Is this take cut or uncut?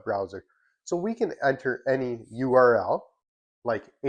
uncut